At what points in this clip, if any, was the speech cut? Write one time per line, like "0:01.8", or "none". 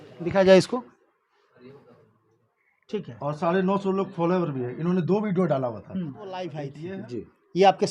0:06.7

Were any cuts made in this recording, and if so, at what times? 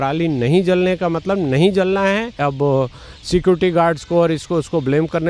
0:02.4

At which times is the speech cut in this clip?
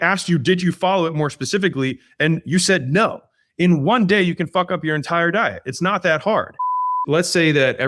0:06.9

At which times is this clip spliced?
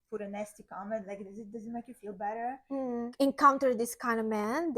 0:03.1

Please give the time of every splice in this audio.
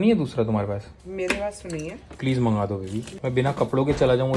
0:02.1
0:03.1

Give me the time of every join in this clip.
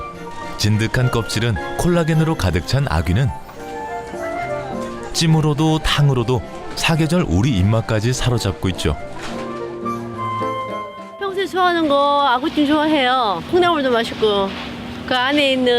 0:05.7

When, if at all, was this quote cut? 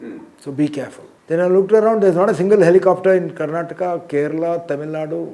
0:01.1

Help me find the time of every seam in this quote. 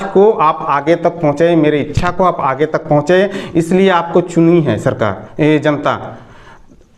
none

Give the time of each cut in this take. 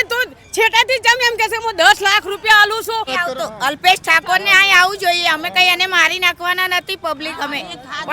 0:03.1

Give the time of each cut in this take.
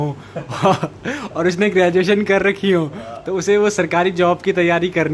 none

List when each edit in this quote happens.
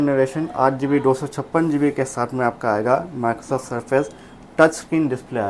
none

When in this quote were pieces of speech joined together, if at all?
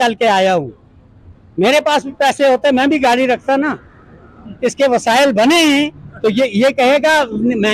none

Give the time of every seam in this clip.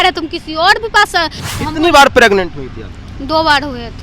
0:01.4

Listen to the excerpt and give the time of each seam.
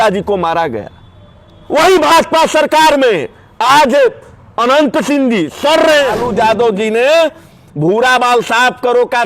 0:06.2

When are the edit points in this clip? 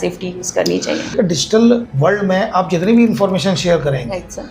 0:01.1
0:01.9

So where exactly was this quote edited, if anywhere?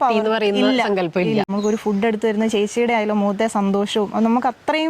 0:01.5

